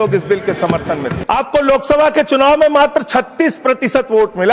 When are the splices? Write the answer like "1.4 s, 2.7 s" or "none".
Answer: 1.1 s

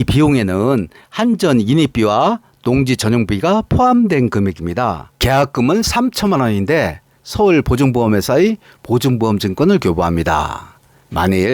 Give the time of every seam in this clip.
5.1 s

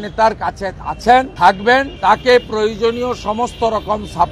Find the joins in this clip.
none

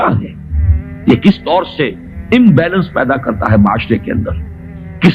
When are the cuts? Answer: none

